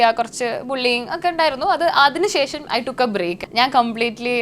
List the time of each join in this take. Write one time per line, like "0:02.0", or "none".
0:03.4